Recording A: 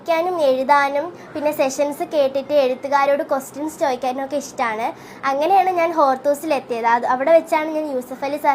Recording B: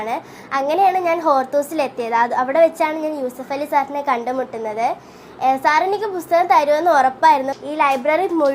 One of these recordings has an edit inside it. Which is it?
B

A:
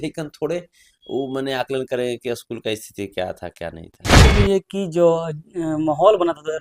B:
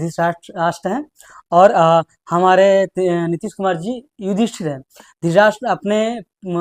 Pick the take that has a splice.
A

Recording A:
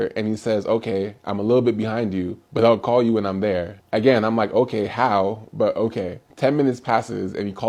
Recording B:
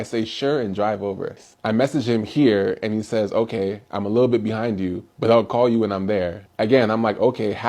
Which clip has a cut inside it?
B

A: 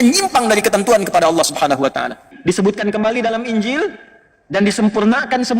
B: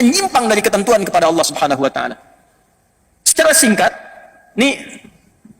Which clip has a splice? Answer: A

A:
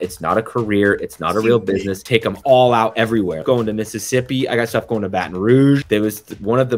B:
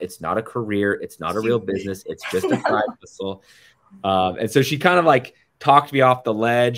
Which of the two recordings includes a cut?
A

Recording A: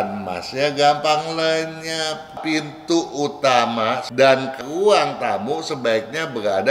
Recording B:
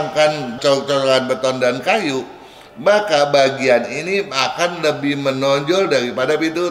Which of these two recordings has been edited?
A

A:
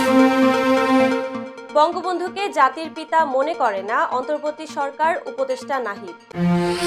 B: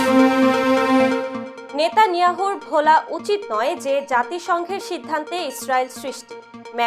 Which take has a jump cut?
A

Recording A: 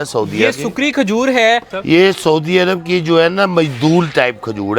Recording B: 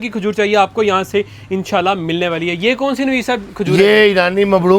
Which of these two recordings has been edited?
A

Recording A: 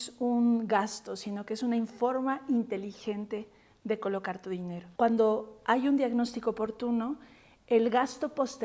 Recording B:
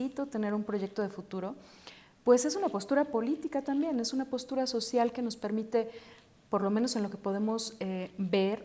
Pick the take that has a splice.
A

